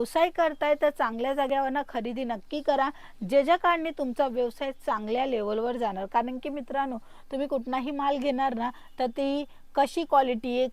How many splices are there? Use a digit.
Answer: 0